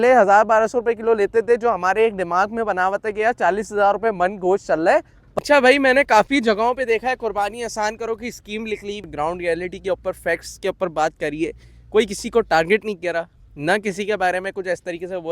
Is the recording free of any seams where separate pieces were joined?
no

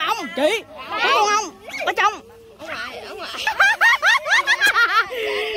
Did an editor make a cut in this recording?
yes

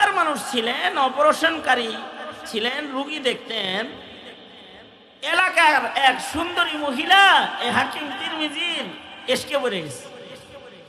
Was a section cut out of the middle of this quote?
no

